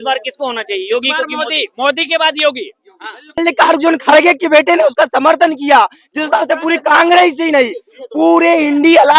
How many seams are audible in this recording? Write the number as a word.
one